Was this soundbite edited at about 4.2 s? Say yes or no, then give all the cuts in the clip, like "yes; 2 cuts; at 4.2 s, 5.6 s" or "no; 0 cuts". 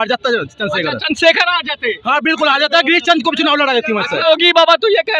yes; 1 cut; at 4.2 s